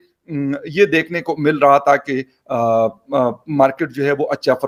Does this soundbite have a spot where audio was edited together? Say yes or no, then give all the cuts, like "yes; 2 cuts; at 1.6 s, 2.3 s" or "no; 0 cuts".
no; 0 cuts